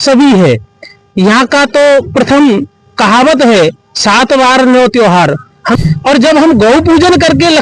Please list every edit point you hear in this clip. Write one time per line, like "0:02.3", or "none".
0:05.8